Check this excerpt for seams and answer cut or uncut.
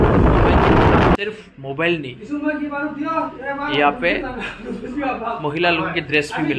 cut